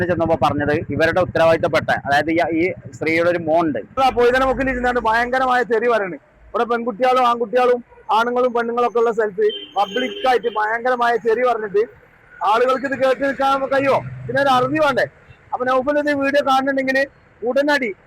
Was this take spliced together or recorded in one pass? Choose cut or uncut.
cut